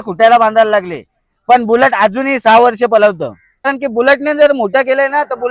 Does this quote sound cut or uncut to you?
cut